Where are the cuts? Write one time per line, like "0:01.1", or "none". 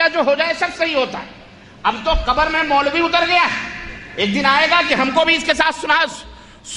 0:03.9